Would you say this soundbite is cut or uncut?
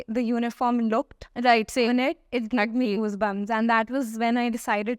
uncut